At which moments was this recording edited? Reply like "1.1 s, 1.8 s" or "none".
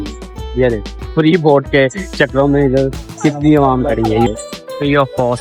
4.3 s